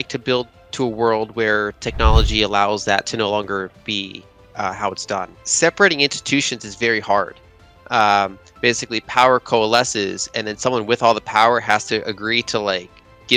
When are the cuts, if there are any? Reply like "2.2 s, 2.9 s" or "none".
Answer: 5.5 s